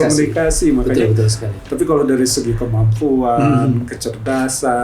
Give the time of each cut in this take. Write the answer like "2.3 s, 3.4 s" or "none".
1.5 s